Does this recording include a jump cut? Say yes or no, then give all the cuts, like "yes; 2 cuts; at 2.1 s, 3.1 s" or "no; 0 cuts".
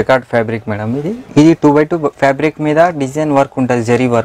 no; 0 cuts